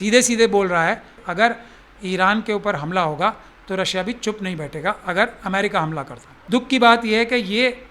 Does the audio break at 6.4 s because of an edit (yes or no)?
yes